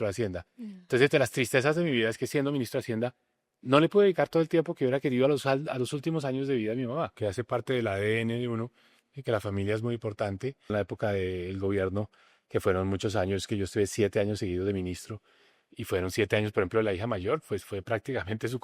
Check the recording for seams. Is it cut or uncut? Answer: cut